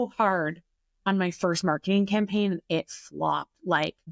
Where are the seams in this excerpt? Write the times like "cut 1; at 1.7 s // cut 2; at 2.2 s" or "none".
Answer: none